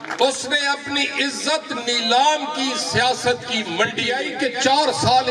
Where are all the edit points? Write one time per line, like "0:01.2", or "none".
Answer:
0:04.2